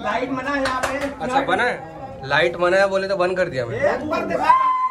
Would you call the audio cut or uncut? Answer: cut